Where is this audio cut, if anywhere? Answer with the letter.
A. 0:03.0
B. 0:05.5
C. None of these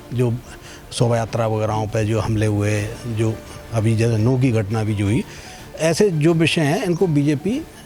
C